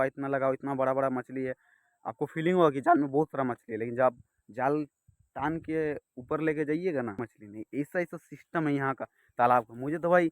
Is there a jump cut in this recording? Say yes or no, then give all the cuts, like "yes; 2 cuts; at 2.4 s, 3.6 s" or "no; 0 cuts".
yes; 1 cut; at 7.2 s